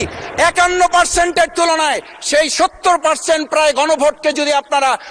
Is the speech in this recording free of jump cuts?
yes; 0 cuts

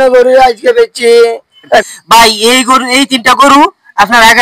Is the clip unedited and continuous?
no; 1 cut; at 1.8 s

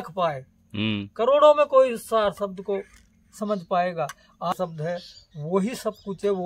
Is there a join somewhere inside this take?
yes; 1 cut; at 4.5 s

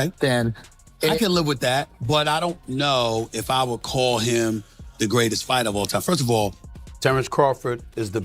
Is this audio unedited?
no; 1 cut; at 6.7 s

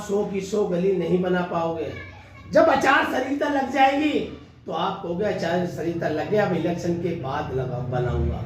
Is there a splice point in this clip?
no; 0 cuts

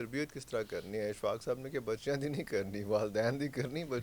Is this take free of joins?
yes; 0 cuts

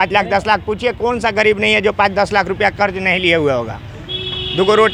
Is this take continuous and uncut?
yes; 0 cuts

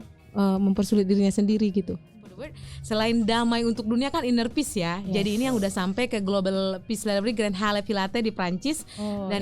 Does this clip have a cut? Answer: yes; 1 cut; at 2.4 s

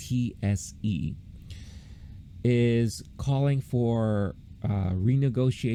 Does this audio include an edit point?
no; 0 cuts

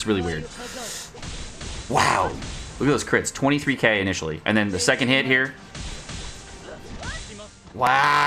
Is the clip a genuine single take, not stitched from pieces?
yes; 0 cuts

